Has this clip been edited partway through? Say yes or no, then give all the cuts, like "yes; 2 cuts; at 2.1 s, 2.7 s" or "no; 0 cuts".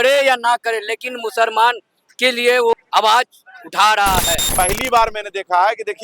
yes; 2 cuts; at 2.7 s, 4.4 s